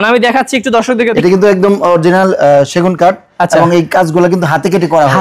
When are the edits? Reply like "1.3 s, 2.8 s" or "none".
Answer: 1.1 s